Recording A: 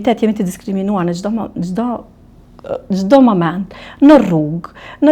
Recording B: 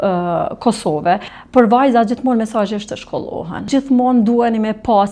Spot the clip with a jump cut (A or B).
B